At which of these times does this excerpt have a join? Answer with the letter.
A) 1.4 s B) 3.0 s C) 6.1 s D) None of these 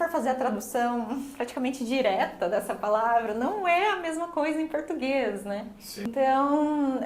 C